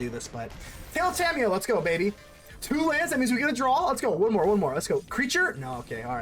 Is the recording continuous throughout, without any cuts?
yes; 0 cuts

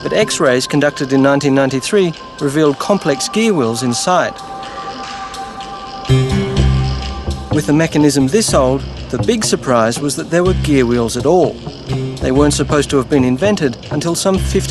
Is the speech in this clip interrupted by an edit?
no; 0 cuts

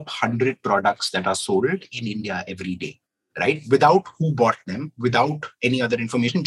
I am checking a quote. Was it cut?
no; 0 cuts

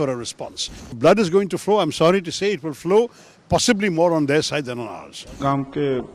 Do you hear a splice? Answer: yes; 2 cuts; at 1.0 s, 5.4 s

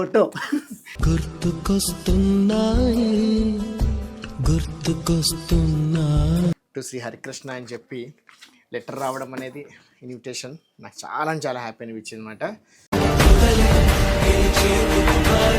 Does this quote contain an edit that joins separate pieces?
yes; 1 cut; at 6.7 s

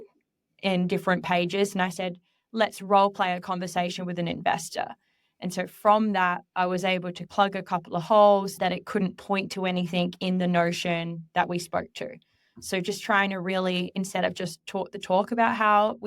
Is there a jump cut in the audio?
yes; 1 cut; at 8.6 s

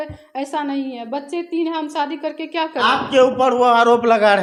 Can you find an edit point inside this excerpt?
no; 0 cuts

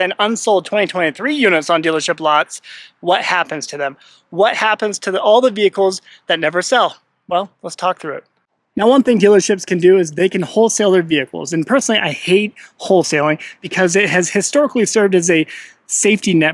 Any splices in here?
no; 0 cuts

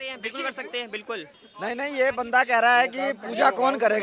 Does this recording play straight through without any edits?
no; 1 cut; at 1.4 s

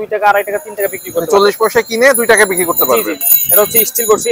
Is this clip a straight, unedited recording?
no; 1 cut; at 3.2 s

